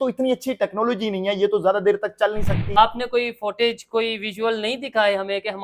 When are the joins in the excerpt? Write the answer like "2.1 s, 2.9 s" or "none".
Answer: 2.8 s